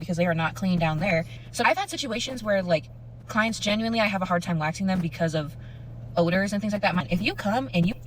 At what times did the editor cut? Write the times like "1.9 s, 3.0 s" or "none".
1.4 s, 7.0 s